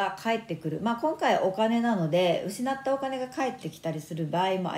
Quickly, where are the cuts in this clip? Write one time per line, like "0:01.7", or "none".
none